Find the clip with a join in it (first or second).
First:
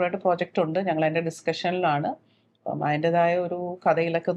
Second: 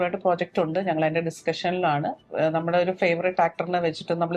second